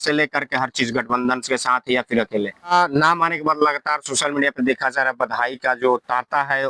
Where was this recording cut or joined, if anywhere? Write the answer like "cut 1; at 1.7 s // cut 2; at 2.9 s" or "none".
cut 1; at 2.7 s